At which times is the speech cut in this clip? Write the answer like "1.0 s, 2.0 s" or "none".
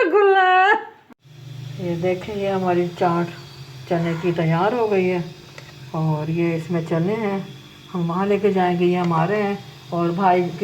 0.9 s